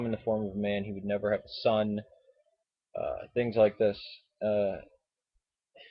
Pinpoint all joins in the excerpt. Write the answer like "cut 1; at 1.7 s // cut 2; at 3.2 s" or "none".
cut 1; at 3.5 s